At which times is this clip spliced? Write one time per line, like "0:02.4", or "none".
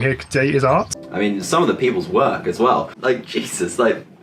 0:01.0
0:02.9